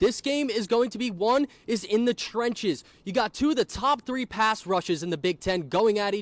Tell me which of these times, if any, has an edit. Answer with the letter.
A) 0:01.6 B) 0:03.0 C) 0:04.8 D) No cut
D